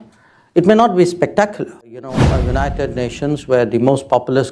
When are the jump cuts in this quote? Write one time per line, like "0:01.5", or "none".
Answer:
0:02.4